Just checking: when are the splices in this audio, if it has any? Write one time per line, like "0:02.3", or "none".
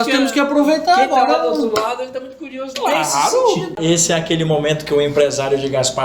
0:03.8